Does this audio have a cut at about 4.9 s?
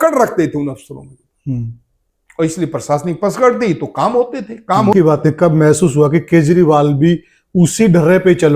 yes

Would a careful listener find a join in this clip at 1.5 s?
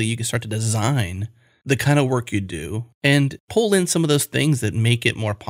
yes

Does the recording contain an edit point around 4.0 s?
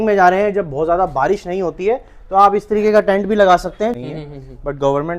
yes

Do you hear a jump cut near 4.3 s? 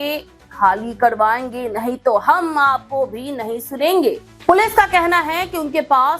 yes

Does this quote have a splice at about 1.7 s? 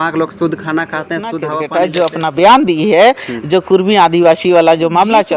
yes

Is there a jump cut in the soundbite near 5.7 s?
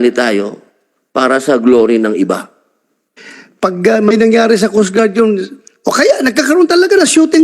no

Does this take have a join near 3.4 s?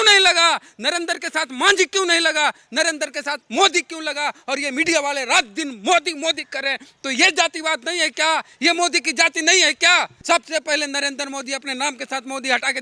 no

